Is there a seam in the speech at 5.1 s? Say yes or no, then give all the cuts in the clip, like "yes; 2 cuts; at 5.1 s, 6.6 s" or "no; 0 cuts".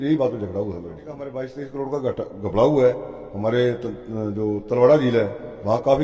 no; 1 cut; at 1.3 s